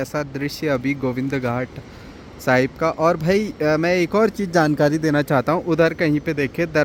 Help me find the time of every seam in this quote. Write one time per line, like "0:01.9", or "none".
none